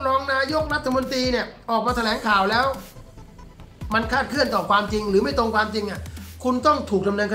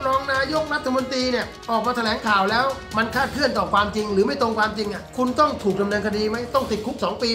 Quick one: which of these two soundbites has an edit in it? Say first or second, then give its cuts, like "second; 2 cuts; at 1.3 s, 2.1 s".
second; 2 cuts; at 2.8 s, 5.0 s